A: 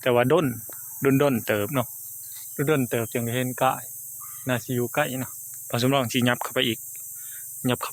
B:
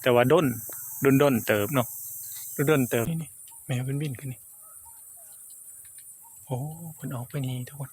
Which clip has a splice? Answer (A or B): B